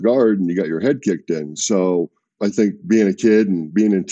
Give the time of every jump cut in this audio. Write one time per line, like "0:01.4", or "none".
0:02.2